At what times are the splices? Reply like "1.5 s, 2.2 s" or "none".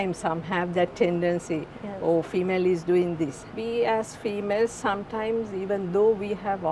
3.5 s